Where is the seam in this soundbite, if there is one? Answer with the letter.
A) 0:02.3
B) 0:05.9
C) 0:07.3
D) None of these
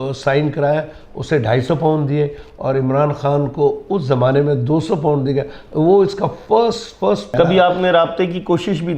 C